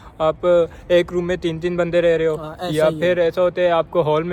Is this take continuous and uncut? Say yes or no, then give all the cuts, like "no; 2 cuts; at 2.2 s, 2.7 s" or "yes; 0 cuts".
yes; 0 cuts